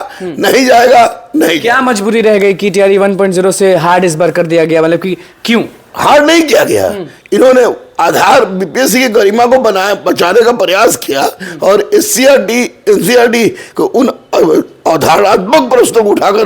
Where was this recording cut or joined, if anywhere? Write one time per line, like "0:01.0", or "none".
none